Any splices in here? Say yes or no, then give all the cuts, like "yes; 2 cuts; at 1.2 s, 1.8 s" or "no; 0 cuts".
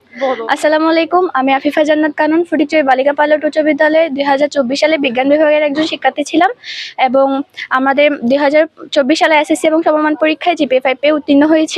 no; 0 cuts